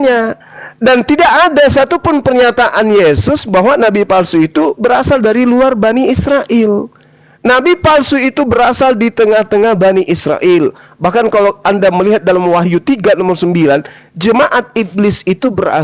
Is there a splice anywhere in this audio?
no; 0 cuts

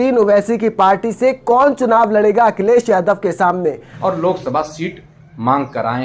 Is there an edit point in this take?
yes; 1 cut; at 3.9 s

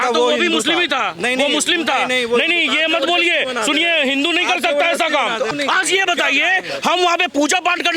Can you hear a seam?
yes; 1 cut; at 5.5 s

